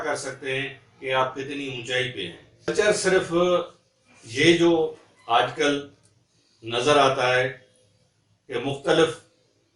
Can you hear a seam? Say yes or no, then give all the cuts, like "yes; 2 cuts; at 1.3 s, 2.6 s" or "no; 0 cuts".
yes; 1 cut; at 2.7 s